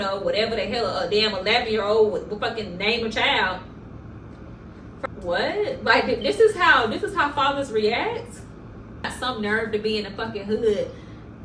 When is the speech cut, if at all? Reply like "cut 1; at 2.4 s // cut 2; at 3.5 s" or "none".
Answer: cut 1; at 5.1 s // cut 2; at 9.1 s